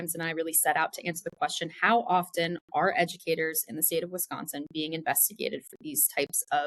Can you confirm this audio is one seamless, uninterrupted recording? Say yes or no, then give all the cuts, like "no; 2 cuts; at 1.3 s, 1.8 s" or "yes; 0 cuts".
yes; 0 cuts